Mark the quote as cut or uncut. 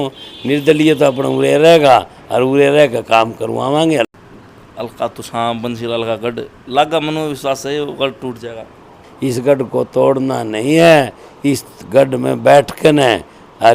cut